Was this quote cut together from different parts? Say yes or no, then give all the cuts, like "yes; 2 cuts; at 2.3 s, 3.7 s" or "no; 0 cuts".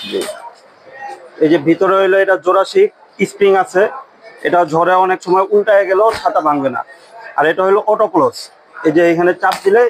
no; 0 cuts